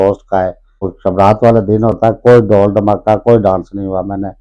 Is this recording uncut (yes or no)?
no